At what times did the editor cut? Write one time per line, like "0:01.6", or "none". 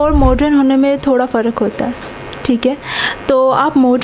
none